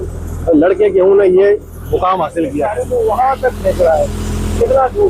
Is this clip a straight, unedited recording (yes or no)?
no